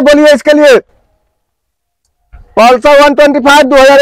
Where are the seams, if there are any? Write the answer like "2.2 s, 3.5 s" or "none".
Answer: none